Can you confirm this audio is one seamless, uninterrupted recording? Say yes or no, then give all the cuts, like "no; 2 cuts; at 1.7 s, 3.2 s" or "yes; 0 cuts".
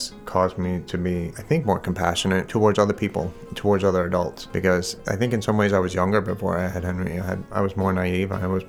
no; 5 cuts; at 1.3 s, 2.5 s, 4.4 s, 5.0 s, 7.4 s